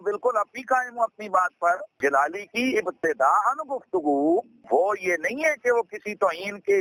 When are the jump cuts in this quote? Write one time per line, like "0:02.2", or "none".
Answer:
none

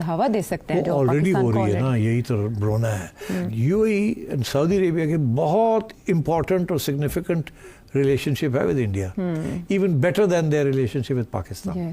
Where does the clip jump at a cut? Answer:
0:03.5

